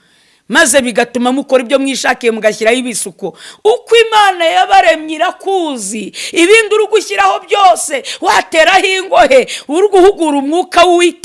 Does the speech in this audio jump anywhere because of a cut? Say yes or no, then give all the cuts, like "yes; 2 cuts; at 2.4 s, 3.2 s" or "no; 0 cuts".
no; 0 cuts